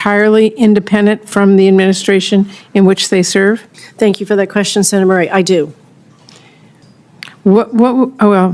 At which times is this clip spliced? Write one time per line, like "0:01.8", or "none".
0:06.8